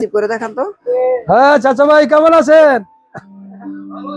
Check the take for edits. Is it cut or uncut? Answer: cut